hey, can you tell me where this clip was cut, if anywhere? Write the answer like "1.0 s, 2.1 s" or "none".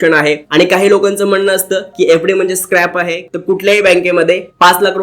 3.2 s